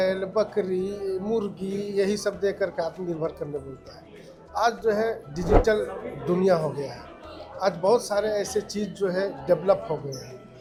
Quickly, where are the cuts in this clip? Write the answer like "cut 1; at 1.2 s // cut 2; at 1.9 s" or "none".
none